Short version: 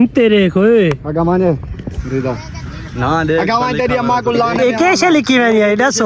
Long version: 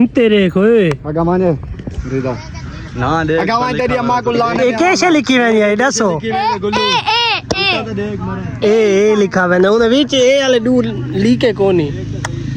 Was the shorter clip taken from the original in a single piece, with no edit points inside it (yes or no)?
yes